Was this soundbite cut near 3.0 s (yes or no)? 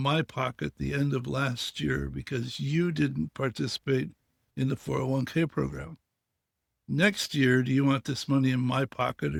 no